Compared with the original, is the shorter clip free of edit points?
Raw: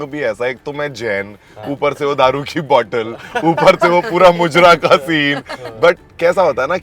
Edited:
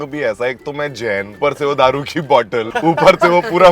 no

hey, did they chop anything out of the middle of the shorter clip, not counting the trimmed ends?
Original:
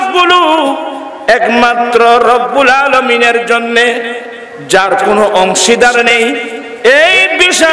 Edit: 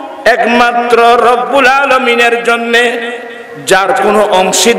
no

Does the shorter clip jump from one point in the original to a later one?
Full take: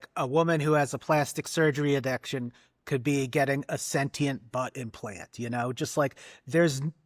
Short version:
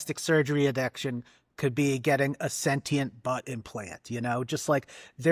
no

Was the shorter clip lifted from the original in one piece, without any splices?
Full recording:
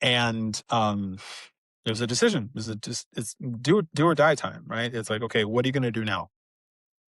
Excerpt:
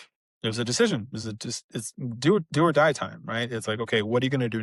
yes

